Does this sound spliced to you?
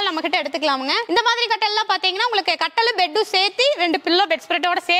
no; 0 cuts

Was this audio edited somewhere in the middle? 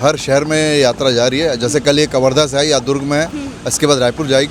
no; 0 cuts

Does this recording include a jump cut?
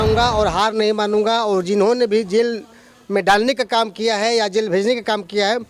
no; 0 cuts

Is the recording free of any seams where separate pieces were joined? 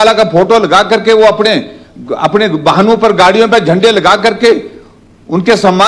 yes; 0 cuts

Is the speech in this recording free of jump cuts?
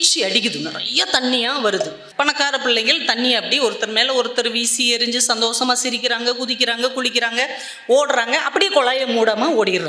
no; 1 cut; at 2.0 s

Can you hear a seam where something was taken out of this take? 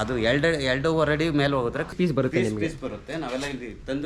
yes; 1 cut; at 1.9 s

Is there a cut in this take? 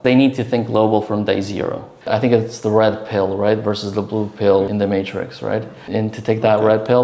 yes; 2 cuts; at 1.9 s, 5.8 s

